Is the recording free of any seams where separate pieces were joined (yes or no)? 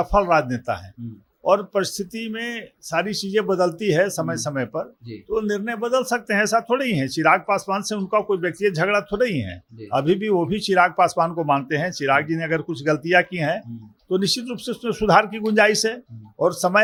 yes